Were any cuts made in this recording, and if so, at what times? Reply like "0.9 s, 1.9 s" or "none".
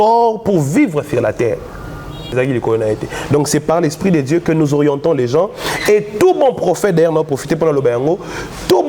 2.3 s